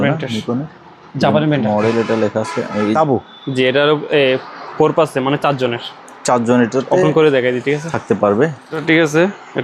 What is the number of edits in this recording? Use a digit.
2